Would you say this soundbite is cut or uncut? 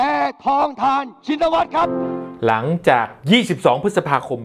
cut